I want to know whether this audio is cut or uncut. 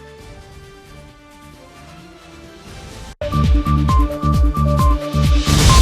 cut